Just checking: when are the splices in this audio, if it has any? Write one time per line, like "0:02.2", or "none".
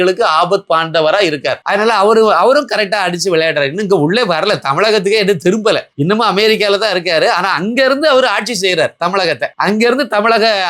0:01.6